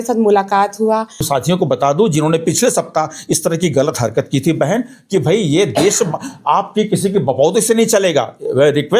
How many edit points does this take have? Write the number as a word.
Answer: one